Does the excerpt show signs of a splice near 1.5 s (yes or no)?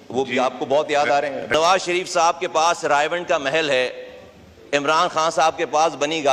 yes